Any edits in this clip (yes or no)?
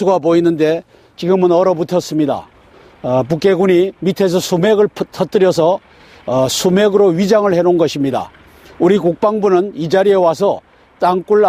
no